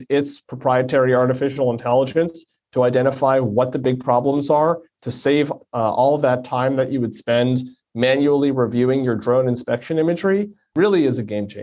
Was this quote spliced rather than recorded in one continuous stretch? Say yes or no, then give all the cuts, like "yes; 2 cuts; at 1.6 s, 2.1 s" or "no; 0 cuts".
yes; 1 cut; at 10.7 s